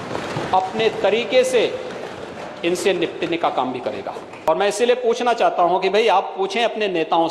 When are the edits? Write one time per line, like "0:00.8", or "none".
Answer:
0:04.3